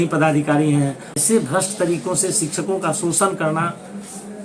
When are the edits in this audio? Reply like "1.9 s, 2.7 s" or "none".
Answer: 1.1 s